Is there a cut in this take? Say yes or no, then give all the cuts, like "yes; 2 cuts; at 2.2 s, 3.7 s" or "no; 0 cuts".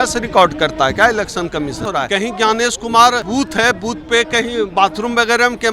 yes; 2 cuts; at 1.9 s, 3.2 s